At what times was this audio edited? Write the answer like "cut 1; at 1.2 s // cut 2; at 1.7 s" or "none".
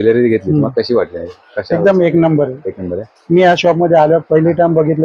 none